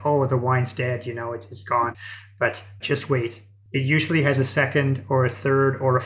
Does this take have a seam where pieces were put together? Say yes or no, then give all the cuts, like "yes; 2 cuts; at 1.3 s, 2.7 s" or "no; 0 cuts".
yes; 1 cut; at 2.2 s